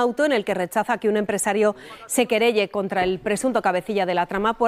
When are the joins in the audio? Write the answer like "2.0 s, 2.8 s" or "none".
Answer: none